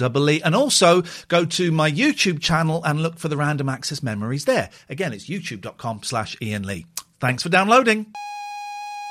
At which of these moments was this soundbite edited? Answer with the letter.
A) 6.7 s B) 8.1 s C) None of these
B